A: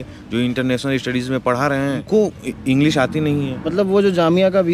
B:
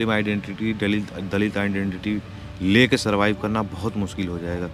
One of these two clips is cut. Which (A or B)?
A